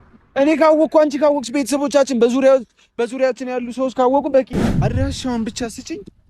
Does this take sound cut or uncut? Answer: cut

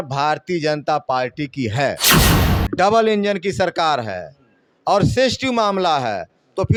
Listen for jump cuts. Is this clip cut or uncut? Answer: uncut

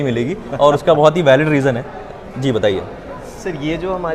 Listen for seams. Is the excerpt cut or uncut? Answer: uncut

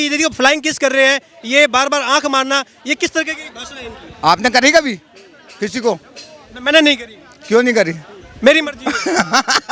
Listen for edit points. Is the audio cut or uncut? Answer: uncut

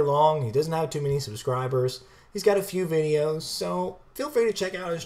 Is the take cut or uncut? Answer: uncut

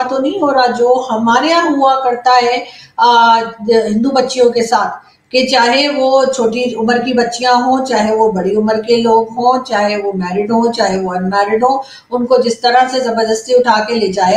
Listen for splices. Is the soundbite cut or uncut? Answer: uncut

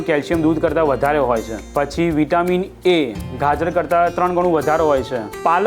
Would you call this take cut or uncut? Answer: cut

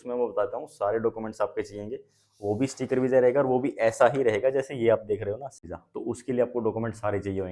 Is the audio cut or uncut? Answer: cut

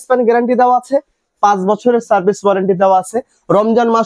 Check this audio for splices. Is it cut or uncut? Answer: uncut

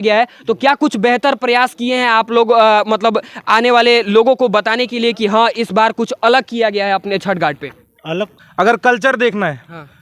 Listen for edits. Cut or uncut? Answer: cut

